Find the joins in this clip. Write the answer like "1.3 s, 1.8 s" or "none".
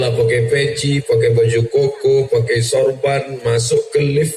none